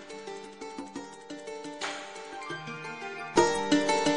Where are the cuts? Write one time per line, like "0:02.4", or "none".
none